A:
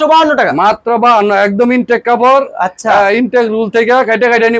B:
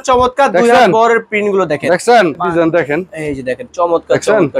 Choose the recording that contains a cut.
B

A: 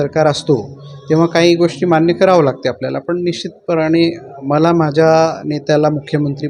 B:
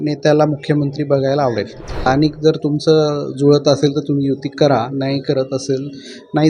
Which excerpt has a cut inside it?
B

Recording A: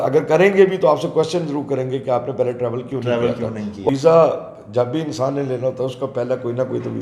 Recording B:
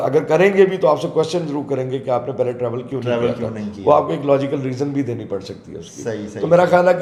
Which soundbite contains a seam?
A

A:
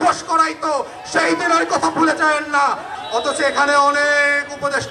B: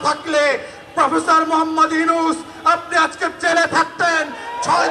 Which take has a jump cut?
A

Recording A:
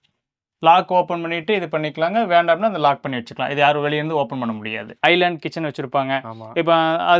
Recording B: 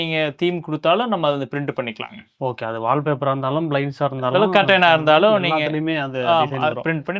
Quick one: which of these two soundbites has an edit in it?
A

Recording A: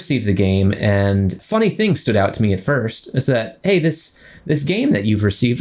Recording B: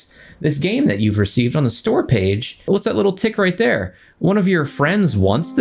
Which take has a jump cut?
B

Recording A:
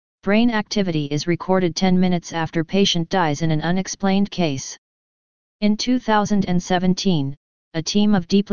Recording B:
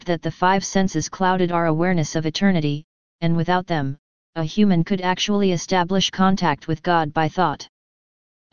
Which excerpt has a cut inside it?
B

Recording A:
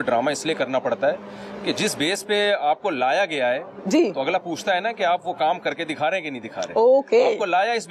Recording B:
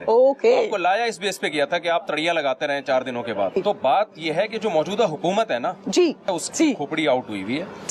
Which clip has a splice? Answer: B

